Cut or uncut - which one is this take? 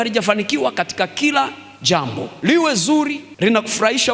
cut